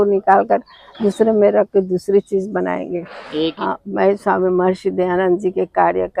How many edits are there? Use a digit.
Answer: 1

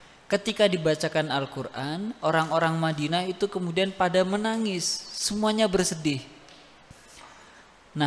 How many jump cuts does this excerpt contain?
0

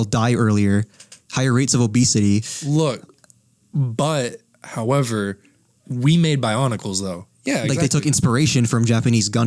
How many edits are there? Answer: 2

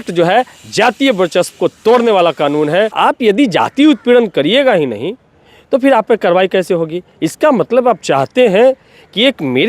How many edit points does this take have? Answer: 1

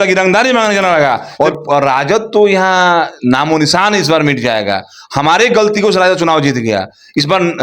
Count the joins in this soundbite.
1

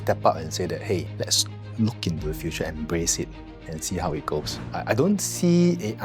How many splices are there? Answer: 2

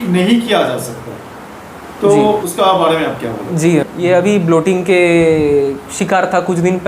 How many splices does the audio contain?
2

